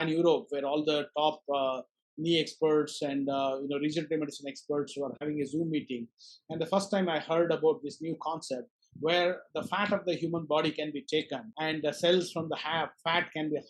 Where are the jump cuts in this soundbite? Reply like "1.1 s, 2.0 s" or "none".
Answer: 11.4 s